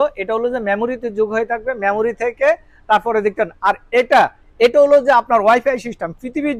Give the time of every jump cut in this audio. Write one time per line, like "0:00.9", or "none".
none